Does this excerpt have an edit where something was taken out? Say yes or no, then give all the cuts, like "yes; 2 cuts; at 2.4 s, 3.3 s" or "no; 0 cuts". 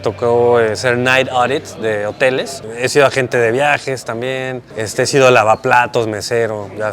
yes; 2 cuts; at 2.6 s, 4.6 s